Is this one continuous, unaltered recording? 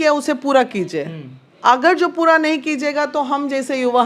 yes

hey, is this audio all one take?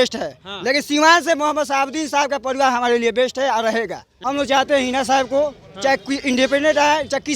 no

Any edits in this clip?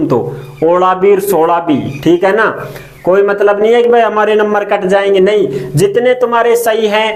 no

